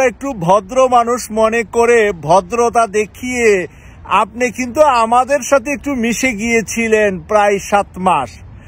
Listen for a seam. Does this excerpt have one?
no; 0 cuts

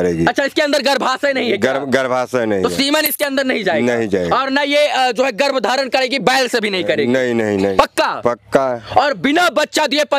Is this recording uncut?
yes; 0 cuts

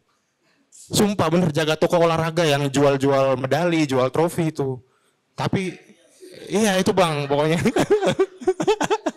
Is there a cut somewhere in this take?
no; 0 cuts

